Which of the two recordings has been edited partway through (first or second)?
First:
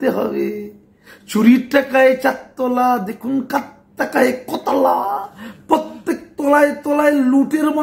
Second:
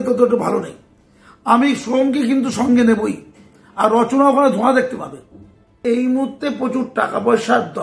second